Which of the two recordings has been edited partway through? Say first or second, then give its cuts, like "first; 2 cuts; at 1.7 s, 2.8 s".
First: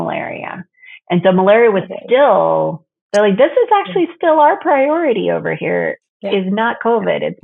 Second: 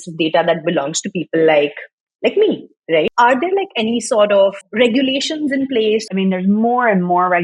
second; 3 cuts; at 3.1 s, 4.6 s, 6.1 s